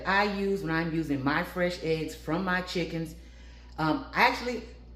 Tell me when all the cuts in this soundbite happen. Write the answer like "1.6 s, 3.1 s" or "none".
none